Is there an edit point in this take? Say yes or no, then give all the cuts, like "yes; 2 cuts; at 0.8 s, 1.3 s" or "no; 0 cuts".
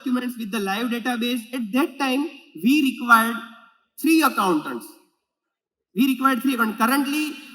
yes; 1 cut; at 1.5 s